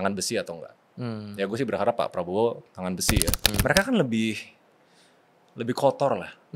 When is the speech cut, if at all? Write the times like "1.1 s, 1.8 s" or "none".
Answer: 3.5 s